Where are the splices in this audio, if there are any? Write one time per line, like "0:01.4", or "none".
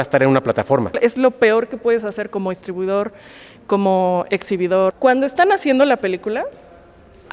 0:00.9
0:05.0